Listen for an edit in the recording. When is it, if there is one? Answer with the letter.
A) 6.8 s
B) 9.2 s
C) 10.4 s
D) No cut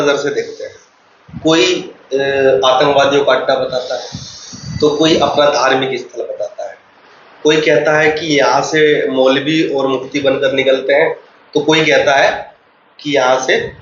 D